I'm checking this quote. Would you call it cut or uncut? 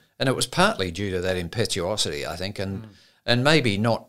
uncut